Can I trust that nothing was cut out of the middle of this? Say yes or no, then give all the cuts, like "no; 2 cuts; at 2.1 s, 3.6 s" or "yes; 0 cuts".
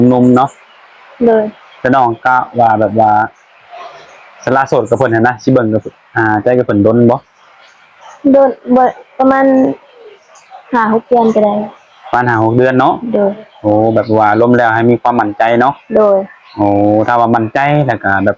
yes; 0 cuts